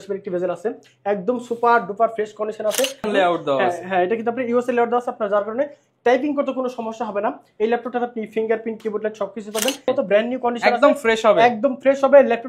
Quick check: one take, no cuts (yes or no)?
no